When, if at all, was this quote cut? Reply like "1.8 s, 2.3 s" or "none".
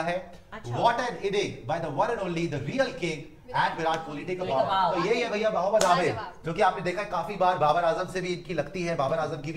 none